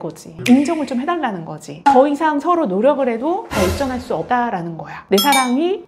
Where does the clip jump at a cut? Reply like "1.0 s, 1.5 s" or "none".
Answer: 1.7 s, 5.0 s